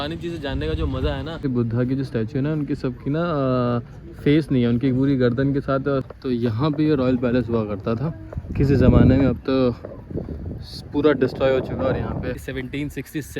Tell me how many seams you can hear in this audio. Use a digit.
3